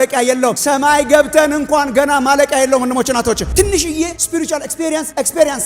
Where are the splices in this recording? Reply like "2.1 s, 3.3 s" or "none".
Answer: 3.4 s